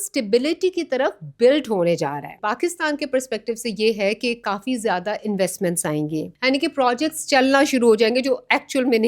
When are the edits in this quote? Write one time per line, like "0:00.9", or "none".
0:02.4
0:06.3